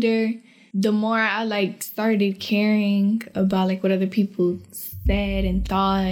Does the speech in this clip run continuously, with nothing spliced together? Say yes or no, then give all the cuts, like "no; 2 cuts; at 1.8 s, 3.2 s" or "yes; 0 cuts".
yes; 0 cuts